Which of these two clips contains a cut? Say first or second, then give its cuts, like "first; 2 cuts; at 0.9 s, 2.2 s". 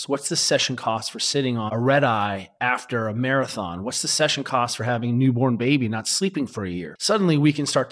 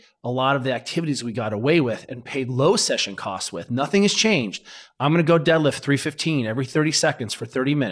first; 2 cuts; at 1.7 s, 6.9 s